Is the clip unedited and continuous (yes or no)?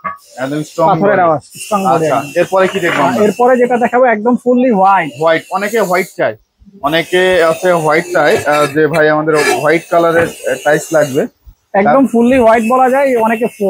yes